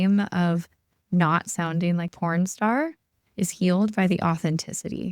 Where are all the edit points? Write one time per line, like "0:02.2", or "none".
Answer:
0:02.1

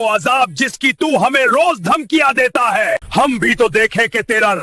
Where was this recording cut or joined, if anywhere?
0:03.0

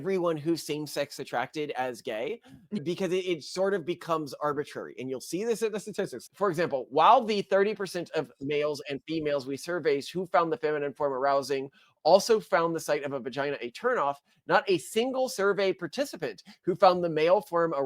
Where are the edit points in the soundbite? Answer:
0:06.2

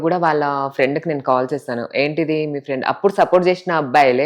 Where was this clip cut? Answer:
none

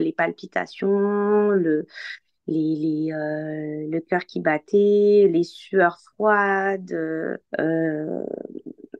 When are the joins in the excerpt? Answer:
none

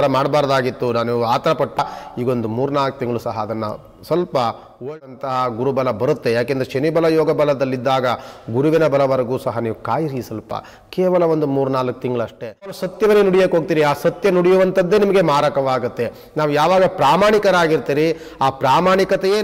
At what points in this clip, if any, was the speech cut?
0:01.8
0:04.9
0:12.8

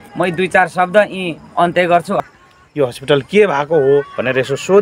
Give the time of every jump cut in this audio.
0:02.3

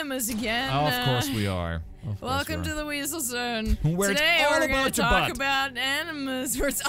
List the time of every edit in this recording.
none

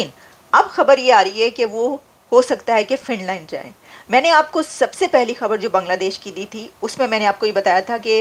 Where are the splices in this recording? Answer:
none

